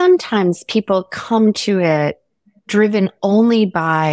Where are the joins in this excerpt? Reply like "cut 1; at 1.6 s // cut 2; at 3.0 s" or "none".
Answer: none